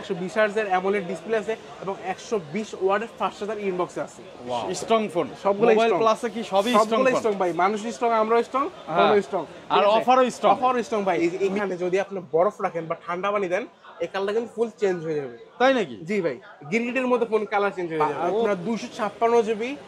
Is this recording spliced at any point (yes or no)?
yes